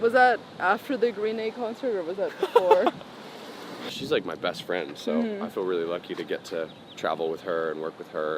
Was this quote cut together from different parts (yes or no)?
yes